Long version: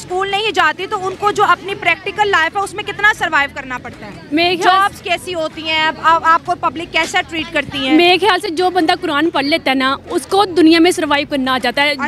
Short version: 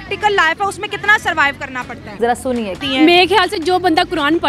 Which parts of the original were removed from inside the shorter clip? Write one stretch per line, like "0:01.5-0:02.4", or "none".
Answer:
0:04.3-0:07.3